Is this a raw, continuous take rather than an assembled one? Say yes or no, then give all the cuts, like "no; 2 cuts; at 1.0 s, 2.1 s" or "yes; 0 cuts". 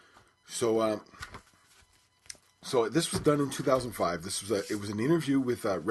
yes; 0 cuts